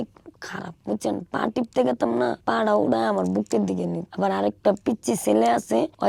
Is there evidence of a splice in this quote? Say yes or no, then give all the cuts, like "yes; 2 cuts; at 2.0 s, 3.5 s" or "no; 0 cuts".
no; 0 cuts